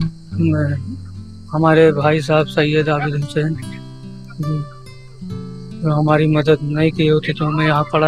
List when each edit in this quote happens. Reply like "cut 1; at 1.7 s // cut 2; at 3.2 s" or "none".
none